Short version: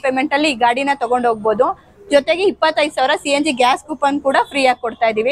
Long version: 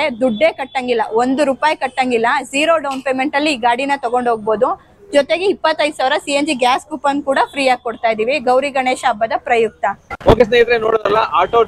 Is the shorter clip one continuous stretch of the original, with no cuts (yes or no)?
yes